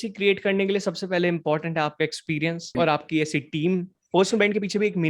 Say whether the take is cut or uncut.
cut